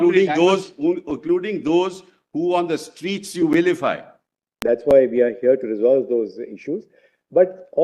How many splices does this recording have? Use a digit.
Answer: 1